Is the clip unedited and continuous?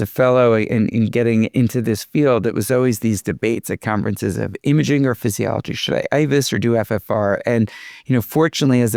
yes; 0 cuts

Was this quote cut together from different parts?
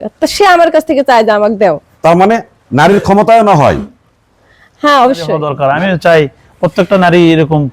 yes; 1 cut; at 5.5 s

